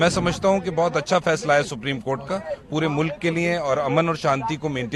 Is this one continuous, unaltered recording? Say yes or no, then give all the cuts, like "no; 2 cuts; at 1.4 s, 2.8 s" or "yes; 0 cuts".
yes; 0 cuts